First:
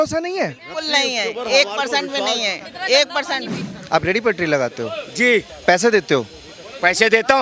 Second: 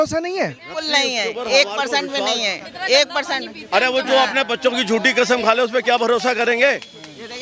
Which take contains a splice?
first; 1 cut; at 3.5 s

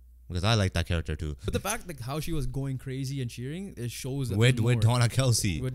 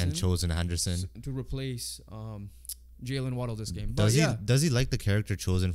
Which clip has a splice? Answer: first; 1 cut; at 1.5 s

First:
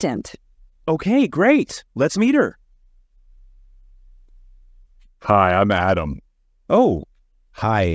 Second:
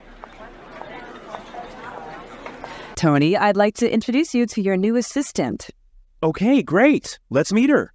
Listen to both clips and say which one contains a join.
second; 1 cut; at 2.9 s

